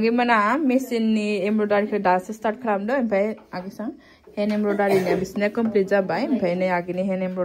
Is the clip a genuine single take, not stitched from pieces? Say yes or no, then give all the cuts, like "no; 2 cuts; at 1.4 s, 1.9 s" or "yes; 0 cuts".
yes; 0 cuts